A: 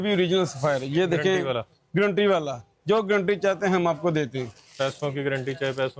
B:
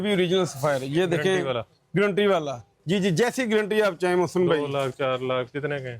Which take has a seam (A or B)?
B